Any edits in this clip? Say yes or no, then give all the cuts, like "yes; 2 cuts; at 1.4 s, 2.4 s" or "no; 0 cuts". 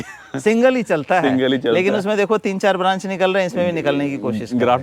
no; 0 cuts